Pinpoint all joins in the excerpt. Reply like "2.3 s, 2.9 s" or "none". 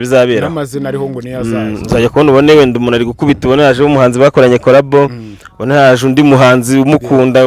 none